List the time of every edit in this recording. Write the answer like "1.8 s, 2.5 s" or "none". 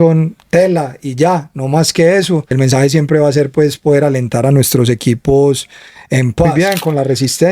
2.5 s, 6.5 s